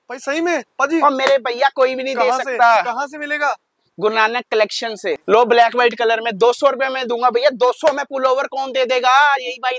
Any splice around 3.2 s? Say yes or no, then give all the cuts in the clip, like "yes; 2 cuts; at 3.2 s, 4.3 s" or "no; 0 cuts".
no; 1 cut; at 5.2 s